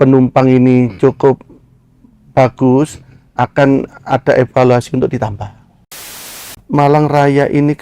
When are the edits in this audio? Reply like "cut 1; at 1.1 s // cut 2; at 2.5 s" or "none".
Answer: cut 1; at 6.1 s